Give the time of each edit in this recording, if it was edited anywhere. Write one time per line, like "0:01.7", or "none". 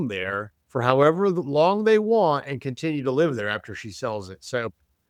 none

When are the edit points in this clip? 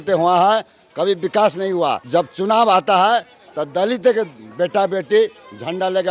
0:02.0

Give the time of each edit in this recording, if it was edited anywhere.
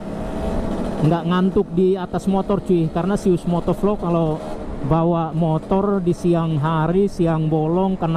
none

